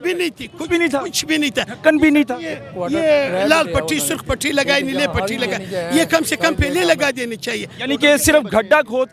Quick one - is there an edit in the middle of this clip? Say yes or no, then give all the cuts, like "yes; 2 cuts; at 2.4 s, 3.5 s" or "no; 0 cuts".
no; 0 cuts